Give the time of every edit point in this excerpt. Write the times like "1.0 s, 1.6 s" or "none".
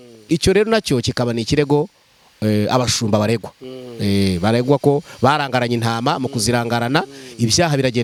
none